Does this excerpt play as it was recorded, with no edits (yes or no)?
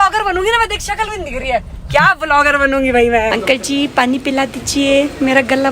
no